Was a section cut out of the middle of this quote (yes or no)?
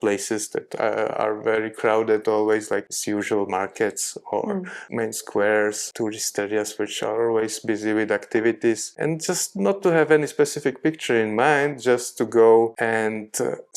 yes